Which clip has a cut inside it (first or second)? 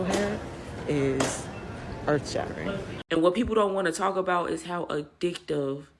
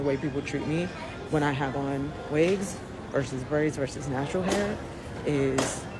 first